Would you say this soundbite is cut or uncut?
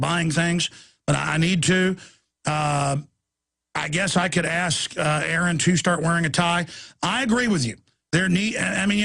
cut